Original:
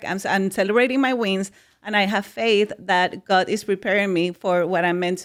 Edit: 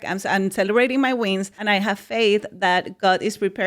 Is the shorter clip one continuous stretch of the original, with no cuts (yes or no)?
no